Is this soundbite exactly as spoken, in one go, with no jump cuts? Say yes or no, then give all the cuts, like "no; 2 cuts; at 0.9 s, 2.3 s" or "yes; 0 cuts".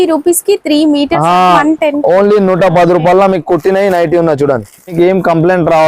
no; 2 cuts; at 1.6 s, 4.9 s